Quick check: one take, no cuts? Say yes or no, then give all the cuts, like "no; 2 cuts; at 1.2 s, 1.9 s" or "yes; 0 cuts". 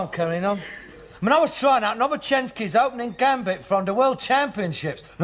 no; 1 cut; at 1.1 s